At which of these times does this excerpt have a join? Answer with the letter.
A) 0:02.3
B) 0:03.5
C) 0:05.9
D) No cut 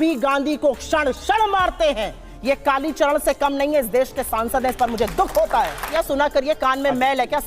C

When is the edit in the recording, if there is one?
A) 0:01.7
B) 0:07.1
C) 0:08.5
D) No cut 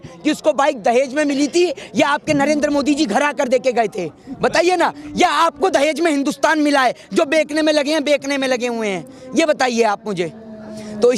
D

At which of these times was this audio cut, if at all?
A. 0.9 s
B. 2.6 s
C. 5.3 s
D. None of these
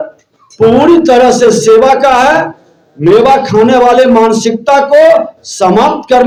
D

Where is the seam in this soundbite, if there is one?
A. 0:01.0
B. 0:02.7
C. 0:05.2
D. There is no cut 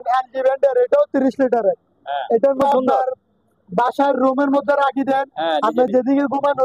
B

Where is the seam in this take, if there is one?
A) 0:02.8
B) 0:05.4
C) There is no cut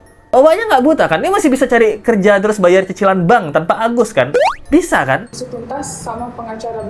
B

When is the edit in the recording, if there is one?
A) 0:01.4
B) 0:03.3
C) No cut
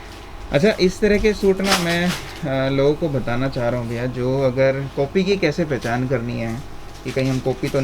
C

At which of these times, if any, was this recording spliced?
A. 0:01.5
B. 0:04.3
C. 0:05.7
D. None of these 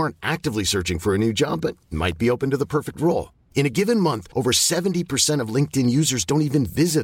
D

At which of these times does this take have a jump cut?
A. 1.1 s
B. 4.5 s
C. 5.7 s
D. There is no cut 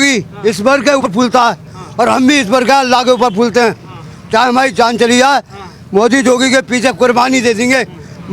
A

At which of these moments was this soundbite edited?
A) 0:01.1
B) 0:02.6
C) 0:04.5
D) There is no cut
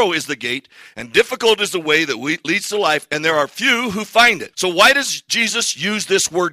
C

